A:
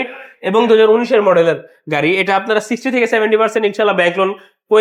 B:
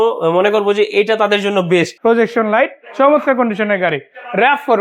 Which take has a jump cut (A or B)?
B